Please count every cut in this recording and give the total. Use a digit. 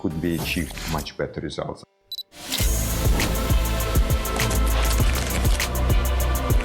1